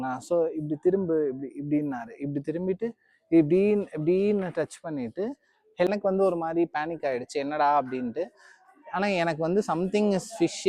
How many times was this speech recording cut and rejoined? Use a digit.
1